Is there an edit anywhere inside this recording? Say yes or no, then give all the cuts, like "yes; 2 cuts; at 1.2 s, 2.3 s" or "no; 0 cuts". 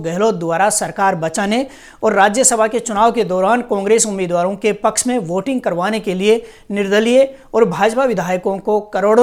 no; 0 cuts